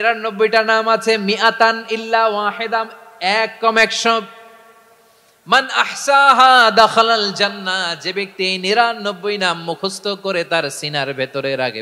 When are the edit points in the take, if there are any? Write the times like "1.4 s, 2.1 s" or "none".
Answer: none